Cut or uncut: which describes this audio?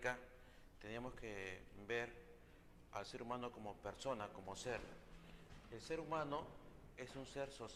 cut